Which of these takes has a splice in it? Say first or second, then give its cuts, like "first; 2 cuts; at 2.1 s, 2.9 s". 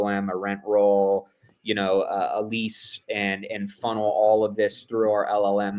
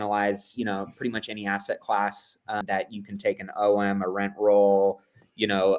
second; 1 cut; at 2.6 s